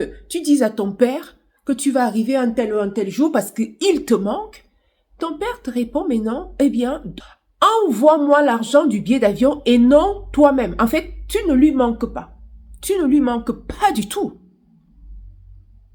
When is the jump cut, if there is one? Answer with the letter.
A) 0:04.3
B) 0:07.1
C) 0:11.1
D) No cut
B